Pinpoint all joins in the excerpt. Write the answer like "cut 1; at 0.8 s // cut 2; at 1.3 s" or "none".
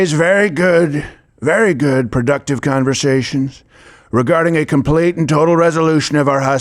none